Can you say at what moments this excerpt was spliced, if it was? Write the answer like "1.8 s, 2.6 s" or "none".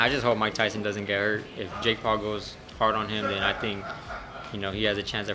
none